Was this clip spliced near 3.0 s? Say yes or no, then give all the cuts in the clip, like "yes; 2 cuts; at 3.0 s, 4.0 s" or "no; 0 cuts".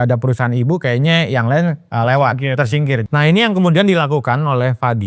yes; 2 cuts; at 1.8 s, 3.0 s